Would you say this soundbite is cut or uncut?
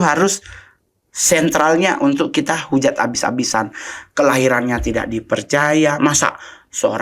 uncut